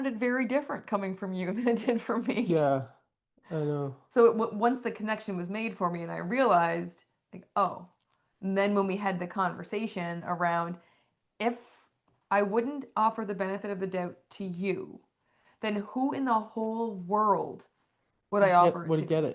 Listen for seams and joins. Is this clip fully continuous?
yes; 0 cuts

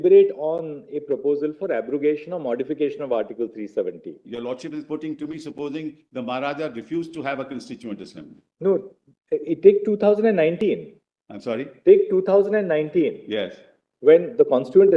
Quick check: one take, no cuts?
yes; 0 cuts

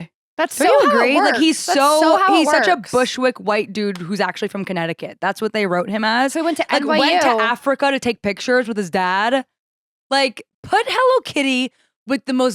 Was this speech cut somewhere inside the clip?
no; 0 cuts

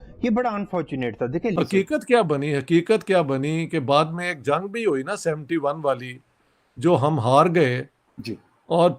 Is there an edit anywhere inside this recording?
yes; 1 cut; at 1.5 s

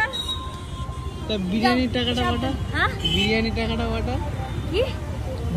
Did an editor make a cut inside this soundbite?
no; 0 cuts

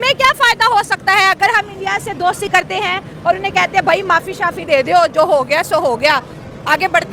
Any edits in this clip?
no; 0 cuts

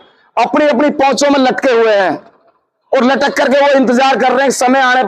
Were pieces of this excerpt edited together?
no; 0 cuts

